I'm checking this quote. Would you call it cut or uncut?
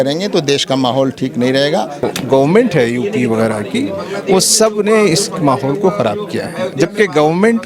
cut